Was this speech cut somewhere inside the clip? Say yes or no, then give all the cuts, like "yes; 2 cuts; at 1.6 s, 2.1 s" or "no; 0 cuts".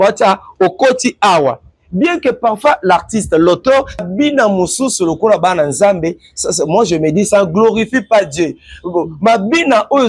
yes; 1 cut; at 4.0 s